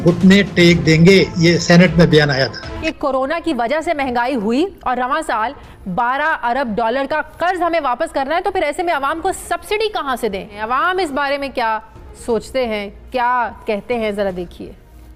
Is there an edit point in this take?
no; 0 cuts

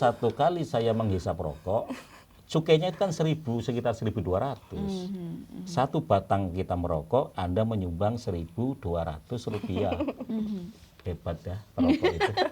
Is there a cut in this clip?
no; 0 cuts

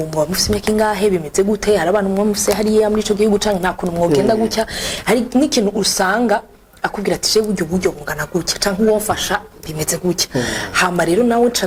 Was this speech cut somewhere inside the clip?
no; 0 cuts

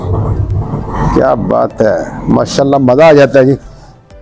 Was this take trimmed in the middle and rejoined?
no; 0 cuts

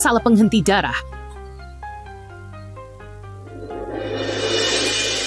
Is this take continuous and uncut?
no; 2 cuts; at 1.6 s, 3.5 s

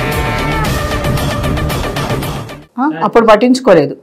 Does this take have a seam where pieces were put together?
yes; 1 cut; at 2.6 s

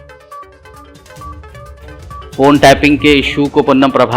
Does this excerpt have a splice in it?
yes; 1 cut; at 1.7 s

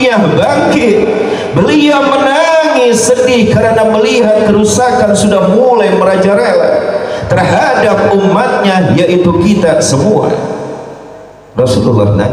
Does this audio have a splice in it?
no; 0 cuts

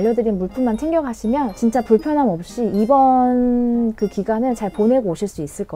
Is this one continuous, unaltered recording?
yes; 0 cuts

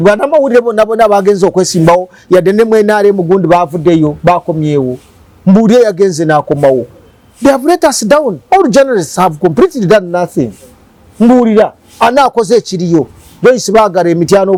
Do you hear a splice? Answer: no; 0 cuts

